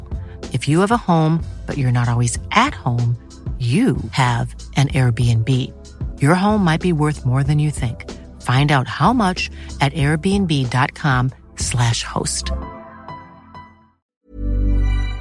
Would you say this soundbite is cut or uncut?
cut